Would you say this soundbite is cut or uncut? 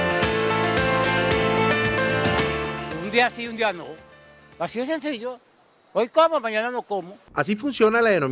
uncut